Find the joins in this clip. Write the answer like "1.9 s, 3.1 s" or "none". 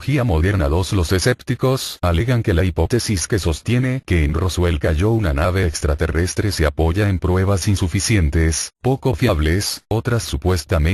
7.7 s